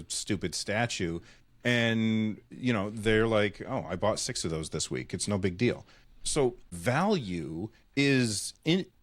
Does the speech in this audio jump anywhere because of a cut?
yes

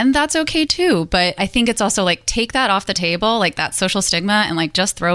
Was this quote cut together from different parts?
no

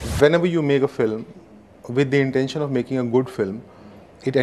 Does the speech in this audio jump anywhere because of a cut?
no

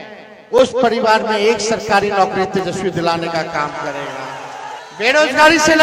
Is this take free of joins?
no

